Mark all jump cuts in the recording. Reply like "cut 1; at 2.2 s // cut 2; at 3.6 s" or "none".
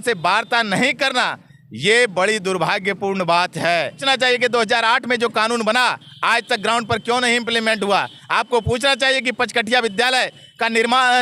cut 1; at 4.0 s